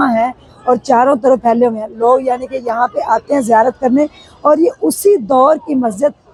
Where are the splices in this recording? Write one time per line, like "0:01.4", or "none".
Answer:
none